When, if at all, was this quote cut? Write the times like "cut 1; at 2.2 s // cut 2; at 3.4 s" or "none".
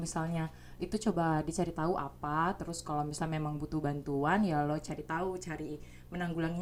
none